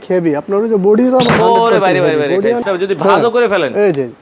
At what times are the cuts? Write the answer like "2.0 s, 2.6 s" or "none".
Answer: 2.6 s